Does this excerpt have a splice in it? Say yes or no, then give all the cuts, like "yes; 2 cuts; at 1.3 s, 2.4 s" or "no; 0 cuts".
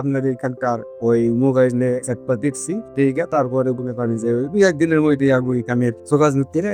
no; 0 cuts